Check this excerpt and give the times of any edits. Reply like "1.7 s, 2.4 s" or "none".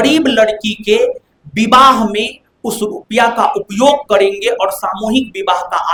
none